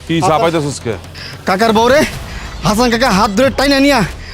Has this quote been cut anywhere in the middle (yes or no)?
yes